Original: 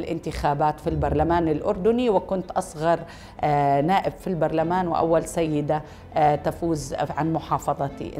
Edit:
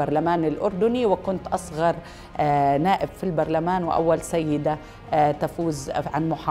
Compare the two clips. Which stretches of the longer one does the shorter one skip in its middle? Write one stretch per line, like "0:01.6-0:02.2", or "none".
none

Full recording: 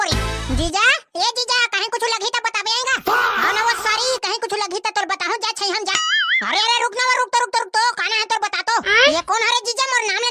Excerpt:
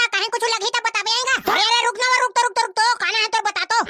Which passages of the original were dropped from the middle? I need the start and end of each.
0:03.1-0:06.5

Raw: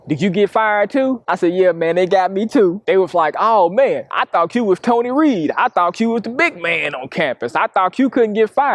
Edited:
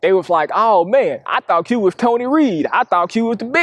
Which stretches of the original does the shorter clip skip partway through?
none

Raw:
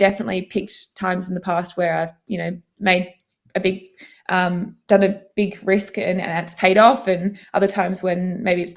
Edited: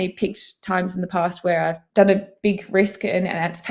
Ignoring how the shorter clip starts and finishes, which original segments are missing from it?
0:02.2-0:04.8

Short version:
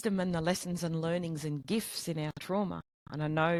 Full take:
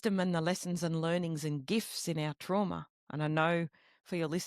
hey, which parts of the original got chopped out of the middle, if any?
none

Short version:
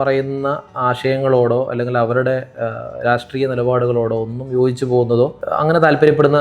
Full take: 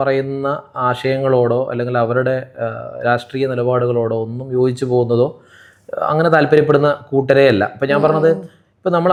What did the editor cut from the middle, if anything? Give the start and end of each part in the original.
0:05.4-0:05.9

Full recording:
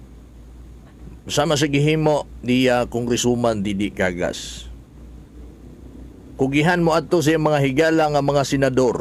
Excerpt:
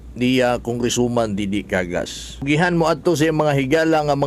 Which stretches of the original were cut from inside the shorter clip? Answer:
0:04.7-0:06.5

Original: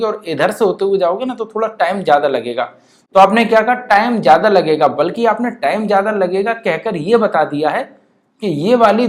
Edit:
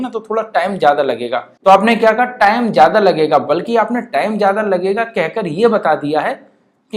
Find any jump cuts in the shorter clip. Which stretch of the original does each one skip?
0:02.7-0:02.9

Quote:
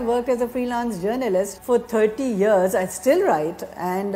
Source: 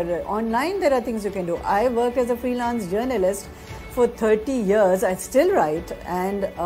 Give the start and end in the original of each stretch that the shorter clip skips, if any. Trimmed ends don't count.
0:03.4-0:03.8

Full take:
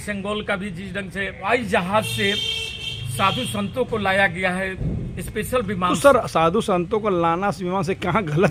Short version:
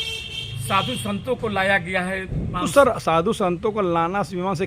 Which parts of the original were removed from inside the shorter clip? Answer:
0:05.0-0:05.8

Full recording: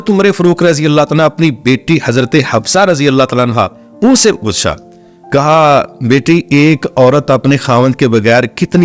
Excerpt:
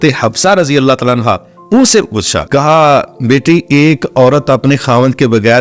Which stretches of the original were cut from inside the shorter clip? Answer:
0:04.7-0:05.2

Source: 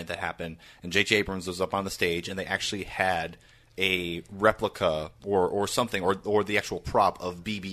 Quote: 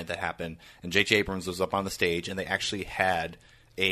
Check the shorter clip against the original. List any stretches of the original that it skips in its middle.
none

